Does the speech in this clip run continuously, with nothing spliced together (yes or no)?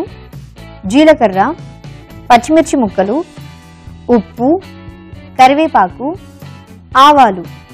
yes